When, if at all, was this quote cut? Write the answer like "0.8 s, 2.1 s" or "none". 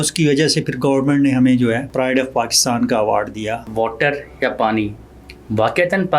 1.9 s, 3.6 s